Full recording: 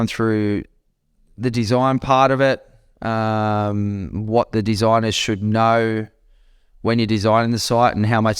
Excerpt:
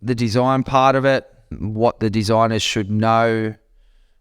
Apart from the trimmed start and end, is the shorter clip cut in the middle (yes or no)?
yes